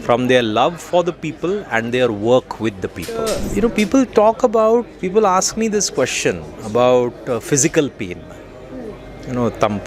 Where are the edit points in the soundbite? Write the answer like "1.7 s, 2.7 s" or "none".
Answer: 3.4 s